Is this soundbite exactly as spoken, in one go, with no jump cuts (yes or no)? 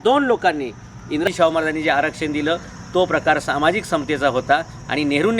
no